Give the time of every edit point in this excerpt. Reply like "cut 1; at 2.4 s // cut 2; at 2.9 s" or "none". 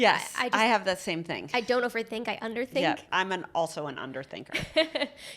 cut 1; at 3.1 s